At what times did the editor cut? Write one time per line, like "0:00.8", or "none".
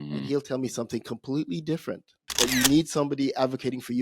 0:02.2